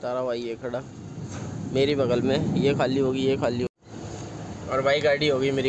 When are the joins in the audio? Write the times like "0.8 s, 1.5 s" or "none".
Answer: 3.7 s